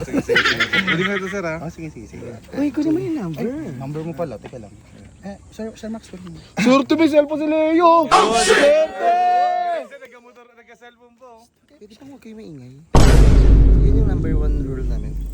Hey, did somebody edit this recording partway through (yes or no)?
no